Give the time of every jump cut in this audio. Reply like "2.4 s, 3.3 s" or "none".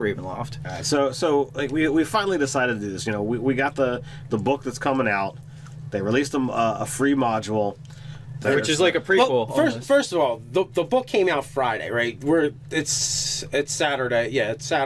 12.6 s